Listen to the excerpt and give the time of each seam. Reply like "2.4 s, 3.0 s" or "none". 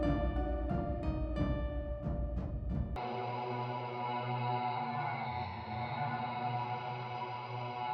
3.0 s